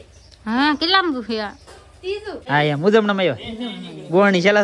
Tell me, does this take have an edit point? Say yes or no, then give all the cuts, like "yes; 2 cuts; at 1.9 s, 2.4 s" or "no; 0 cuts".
yes; 1 cut; at 2.4 s